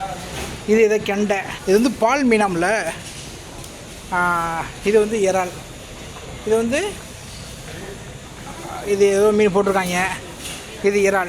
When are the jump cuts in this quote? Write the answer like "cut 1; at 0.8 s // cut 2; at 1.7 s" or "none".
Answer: cut 1; at 1.5 s